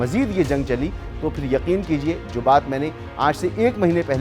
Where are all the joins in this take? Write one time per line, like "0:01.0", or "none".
none